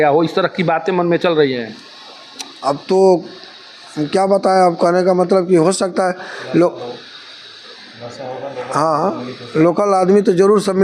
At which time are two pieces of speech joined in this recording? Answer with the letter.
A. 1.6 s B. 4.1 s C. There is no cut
C